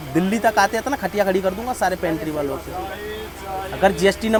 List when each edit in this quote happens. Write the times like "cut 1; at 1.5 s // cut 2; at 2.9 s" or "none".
none